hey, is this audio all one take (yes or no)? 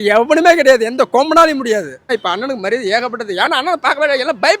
no